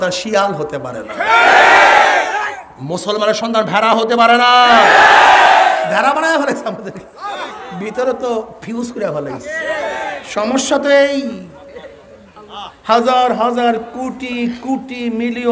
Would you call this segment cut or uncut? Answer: uncut